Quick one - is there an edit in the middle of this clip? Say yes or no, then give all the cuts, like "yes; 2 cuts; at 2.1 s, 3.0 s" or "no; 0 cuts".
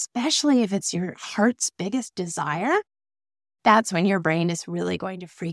no; 0 cuts